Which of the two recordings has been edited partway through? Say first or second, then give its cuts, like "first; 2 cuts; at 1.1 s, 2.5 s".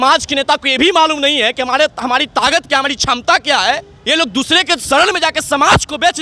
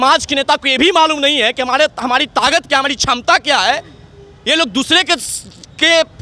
first; 2 cuts; at 3.9 s, 4.8 s